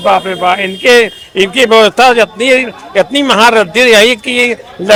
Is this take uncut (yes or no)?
yes